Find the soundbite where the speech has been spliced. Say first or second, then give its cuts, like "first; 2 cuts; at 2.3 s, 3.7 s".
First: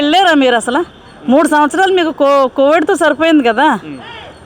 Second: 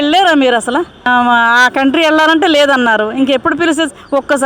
second; 1 cut; at 1.0 s